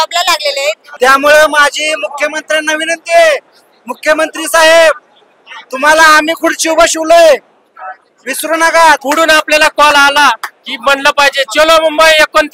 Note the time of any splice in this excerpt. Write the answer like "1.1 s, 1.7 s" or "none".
0.8 s, 9.0 s